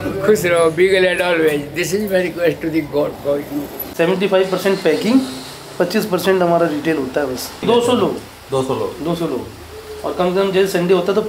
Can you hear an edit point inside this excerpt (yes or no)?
yes